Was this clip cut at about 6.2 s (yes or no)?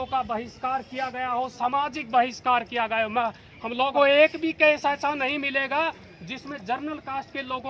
no